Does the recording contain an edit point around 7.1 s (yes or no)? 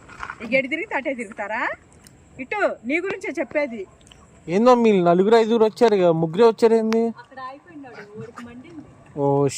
no